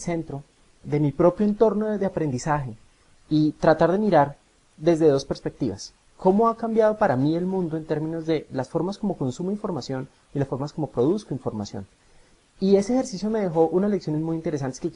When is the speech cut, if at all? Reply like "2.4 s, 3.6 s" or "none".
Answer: 2.3 s